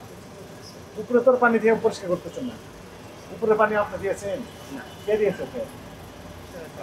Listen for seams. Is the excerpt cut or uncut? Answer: uncut